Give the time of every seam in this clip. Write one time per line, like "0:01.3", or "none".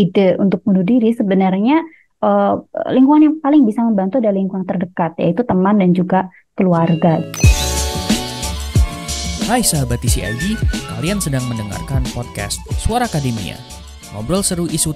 0:07.3